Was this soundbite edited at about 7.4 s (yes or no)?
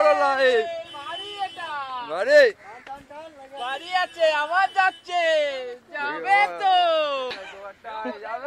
yes